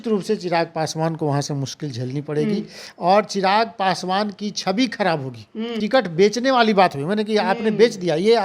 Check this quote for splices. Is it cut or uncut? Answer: cut